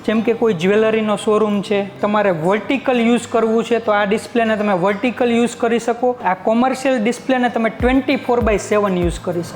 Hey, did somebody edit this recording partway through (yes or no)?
yes